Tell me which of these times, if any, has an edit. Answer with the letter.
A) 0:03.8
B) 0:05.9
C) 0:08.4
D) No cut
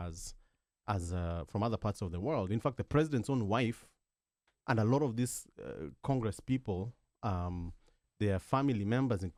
D